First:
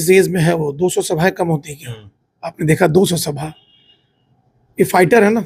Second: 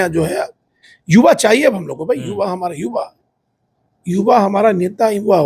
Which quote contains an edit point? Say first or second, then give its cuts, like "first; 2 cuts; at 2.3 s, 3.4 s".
second; 1 cut; at 0.9 s